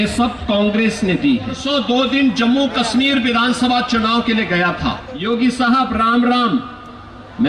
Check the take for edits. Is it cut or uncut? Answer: cut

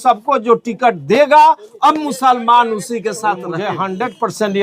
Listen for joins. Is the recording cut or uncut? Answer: cut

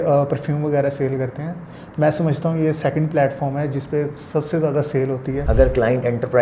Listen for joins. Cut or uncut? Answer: cut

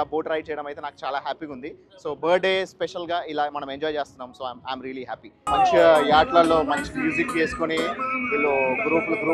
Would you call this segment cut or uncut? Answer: cut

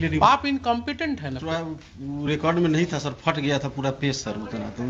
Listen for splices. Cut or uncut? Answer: cut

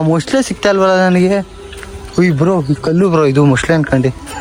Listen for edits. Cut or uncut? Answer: uncut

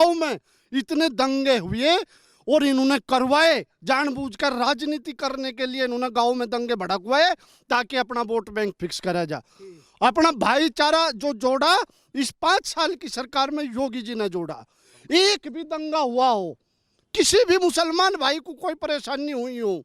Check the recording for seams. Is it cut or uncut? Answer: uncut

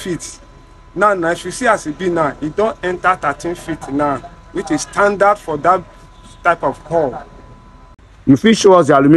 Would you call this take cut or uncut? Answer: cut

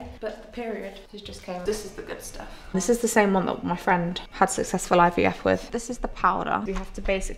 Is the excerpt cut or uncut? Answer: cut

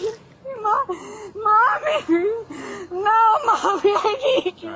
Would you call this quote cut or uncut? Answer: uncut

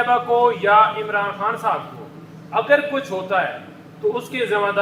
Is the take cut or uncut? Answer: uncut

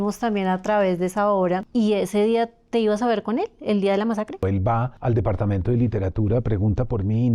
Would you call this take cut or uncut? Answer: cut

